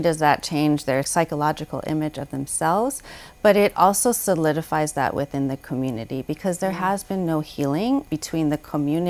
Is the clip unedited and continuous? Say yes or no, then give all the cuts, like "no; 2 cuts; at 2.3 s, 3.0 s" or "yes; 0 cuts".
no; 2 cuts; at 1.1 s, 8.1 s